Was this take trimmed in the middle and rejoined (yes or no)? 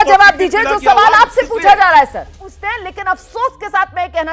yes